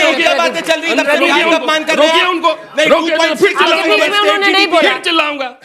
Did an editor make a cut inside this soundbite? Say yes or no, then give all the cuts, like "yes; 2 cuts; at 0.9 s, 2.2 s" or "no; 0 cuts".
no; 0 cuts